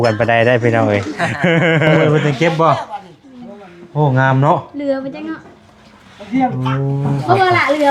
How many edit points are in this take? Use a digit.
1